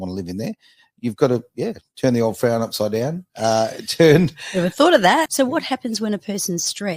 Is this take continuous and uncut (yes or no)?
no